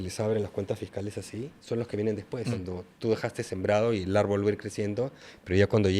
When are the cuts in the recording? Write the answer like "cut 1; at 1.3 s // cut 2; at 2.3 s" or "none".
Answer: cut 1; at 2.5 s